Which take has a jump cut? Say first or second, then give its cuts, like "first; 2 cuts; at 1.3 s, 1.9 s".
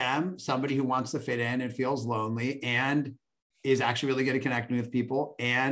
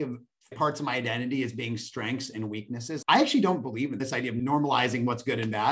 second; 2 cuts; at 2.9 s, 4.3 s